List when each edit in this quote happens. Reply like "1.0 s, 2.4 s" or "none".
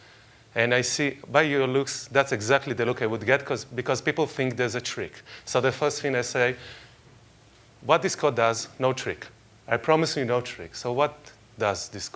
2.9 s